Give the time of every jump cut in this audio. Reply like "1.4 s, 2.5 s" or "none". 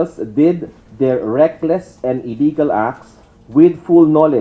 none